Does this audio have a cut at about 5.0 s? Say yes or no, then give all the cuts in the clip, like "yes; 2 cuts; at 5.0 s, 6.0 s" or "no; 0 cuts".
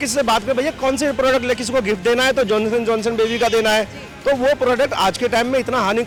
no; 0 cuts